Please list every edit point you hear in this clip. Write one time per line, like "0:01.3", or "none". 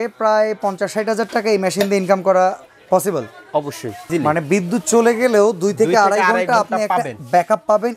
0:04.1